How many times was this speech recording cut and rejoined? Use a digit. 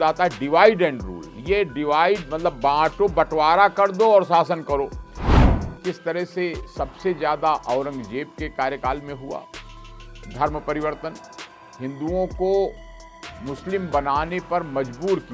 1